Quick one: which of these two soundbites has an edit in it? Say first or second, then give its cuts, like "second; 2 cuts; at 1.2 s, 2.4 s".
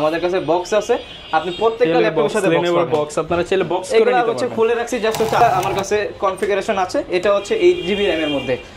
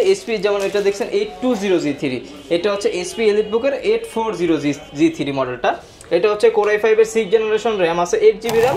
first; 1 cut; at 5.4 s